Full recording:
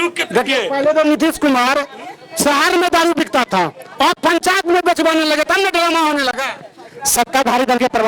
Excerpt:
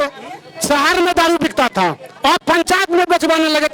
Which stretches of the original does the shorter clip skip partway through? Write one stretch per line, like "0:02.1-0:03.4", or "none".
none

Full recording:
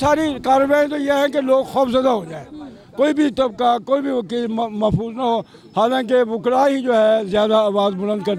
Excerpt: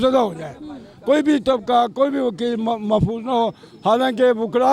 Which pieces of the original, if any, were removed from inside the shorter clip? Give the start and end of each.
none

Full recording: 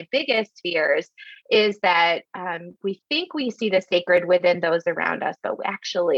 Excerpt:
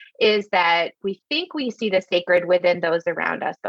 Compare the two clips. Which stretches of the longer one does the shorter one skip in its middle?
0:02.3-0:02.7

